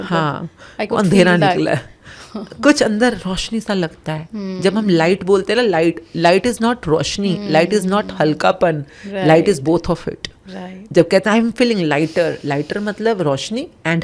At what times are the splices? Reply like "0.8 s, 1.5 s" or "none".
none